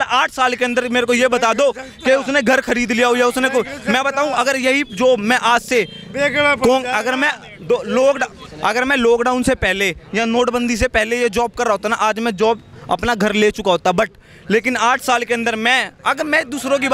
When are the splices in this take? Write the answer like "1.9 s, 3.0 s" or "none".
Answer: none